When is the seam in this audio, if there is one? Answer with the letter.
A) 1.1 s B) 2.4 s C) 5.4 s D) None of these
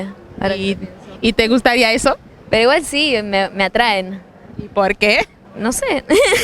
C